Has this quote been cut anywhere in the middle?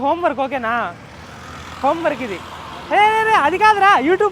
no; 0 cuts

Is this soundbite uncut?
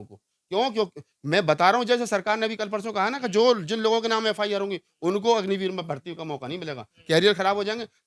yes; 0 cuts

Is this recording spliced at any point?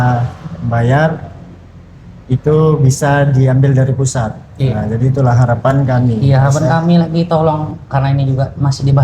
yes; 1 cut; at 6.2 s

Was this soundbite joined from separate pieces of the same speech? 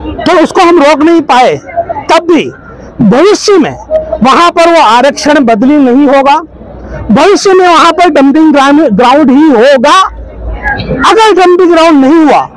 no; 0 cuts

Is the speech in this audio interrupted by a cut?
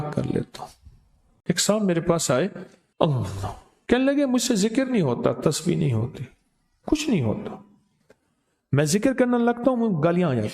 yes; 1 cut; at 1.3 s

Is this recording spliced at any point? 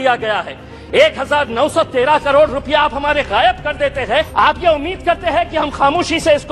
yes; 1 cut; at 4.3 s

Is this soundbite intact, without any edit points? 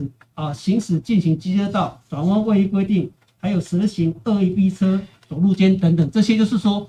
yes; 0 cuts

